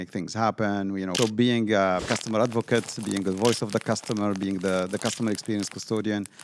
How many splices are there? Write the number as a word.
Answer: two